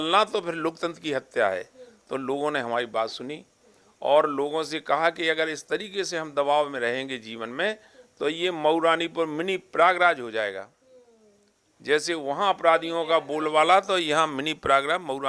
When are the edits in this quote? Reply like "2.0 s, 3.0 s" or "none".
none